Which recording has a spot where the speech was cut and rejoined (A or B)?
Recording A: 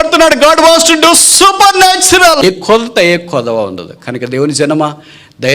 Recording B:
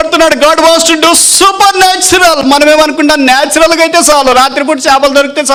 A